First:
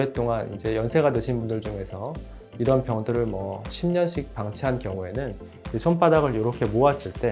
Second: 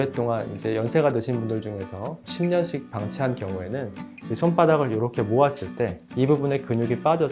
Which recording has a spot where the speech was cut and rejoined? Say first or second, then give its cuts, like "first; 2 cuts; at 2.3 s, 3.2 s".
second; 2 cuts; at 2.2 s, 6.0 s